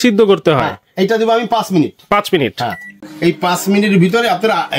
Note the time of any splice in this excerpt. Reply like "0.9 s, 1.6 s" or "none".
3.1 s